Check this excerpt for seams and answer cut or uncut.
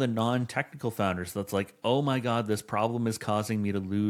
uncut